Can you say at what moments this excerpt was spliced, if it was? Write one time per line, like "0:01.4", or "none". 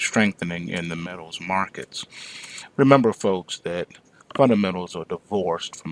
none